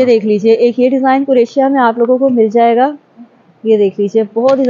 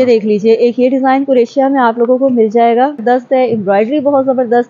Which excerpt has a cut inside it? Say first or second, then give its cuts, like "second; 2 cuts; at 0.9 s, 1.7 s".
second; 1 cut; at 3.0 s